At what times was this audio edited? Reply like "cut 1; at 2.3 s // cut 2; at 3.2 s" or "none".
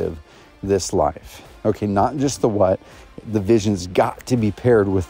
none